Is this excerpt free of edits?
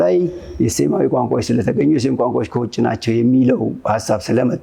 yes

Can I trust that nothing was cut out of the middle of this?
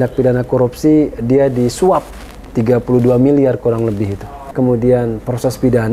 no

